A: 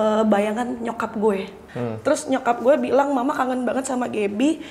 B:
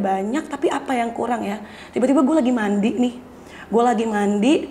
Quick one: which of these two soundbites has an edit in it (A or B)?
A